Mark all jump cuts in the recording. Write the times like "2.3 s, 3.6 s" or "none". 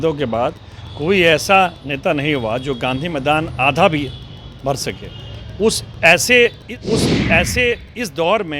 6.7 s